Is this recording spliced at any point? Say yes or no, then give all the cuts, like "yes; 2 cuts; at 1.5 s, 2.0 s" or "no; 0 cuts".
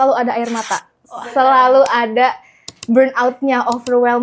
no; 0 cuts